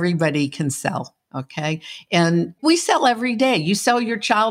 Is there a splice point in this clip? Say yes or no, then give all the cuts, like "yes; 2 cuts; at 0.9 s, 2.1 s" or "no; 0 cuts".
no; 0 cuts